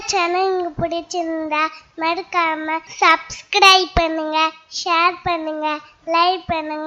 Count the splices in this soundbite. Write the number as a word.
one